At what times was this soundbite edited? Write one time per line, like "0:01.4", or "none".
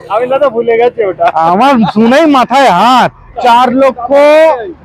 0:03.4